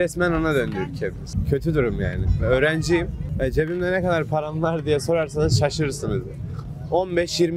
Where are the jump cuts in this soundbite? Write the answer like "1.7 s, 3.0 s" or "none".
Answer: none